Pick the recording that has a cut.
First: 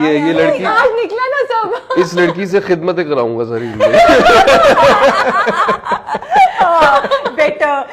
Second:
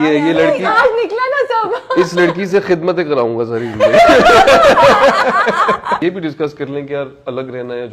second; 1 cut; at 6.0 s

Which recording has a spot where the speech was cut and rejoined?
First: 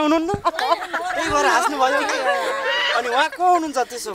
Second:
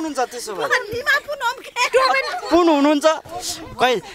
second; 1 cut; at 3.2 s

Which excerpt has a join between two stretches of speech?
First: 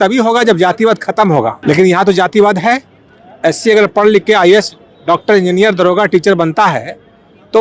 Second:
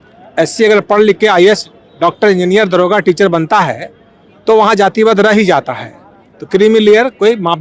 first; 1 cut; at 1.6 s

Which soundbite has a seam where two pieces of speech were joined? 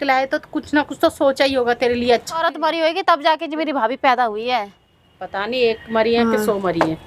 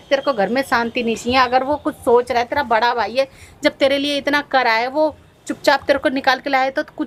first; 1 cut; at 2.4 s

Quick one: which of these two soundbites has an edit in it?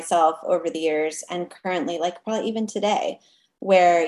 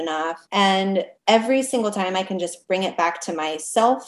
second; 1 cut; at 1.1 s

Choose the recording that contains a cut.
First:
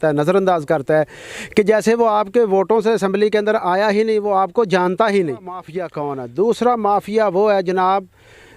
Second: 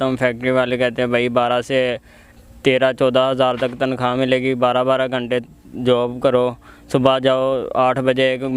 first; 1 cut; at 5.8 s

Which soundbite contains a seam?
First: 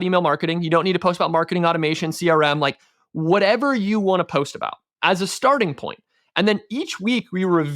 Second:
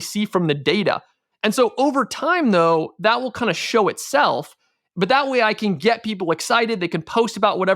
second; 1 cut; at 1.3 s

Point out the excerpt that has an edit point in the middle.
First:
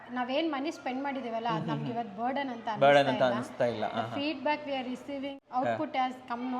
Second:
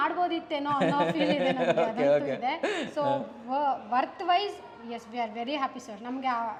first; 1 cut; at 5.4 s

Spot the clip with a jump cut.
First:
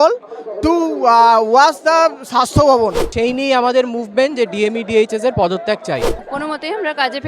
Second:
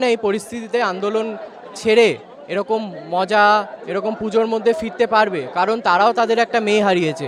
first; 2 cuts; at 3.0 s, 6.2 s

